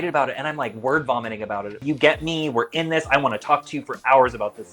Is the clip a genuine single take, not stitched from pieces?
no; 1 cut; at 1.8 s

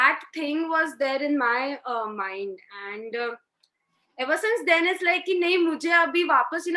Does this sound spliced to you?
no; 0 cuts

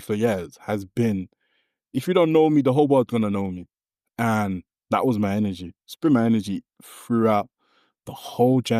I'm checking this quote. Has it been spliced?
no; 0 cuts

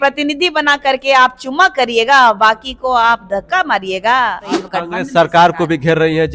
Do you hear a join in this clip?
yes; 1 cut; at 4.6 s

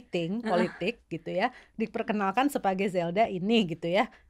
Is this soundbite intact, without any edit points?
yes; 0 cuts

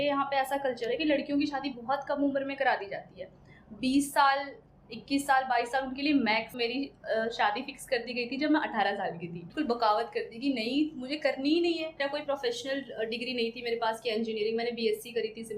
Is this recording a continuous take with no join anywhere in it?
no; 3 cuts; at 6.5 s, 9.5 s, 12.0 s

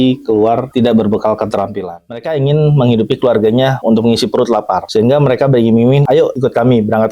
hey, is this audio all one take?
no; 4 cuts; at 1.9 s, 3.8 s, 4.8 s, 6.1 s

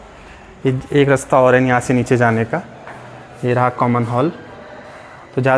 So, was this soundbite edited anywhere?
no; 0 cuts

